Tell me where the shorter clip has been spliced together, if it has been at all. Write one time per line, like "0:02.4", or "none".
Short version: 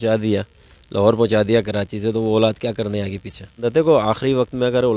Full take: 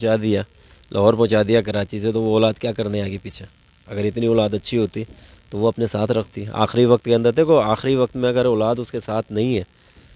0:03.6